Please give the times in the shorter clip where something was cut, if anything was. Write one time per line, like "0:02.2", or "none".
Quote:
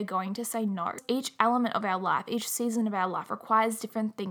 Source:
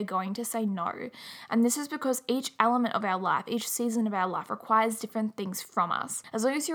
0:01.0